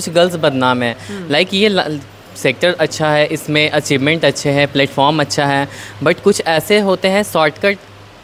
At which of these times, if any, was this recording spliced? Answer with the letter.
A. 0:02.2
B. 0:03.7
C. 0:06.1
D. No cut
D